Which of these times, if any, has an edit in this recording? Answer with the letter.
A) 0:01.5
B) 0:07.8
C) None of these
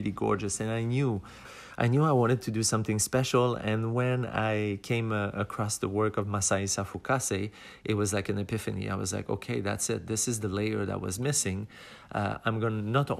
A